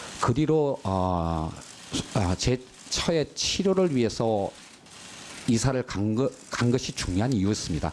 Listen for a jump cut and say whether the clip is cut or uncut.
cut